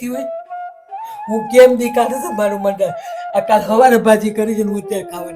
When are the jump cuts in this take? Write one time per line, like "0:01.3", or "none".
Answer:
none